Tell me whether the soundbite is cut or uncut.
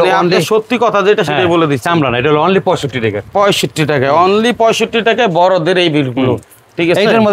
uncut